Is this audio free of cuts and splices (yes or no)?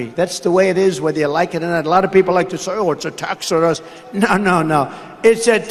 yes